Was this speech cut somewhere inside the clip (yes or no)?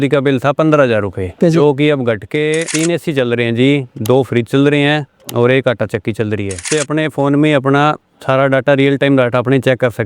yes